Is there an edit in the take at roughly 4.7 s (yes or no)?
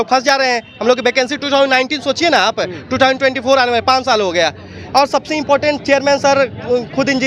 no